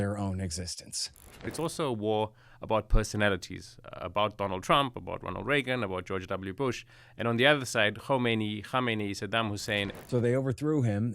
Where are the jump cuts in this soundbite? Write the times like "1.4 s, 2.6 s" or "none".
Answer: 1.5 s, 9.9 s